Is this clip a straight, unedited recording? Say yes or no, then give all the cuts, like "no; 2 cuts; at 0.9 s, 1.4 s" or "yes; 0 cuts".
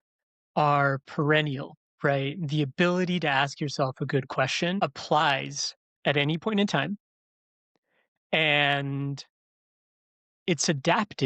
no; 1 cut; at 4.8 s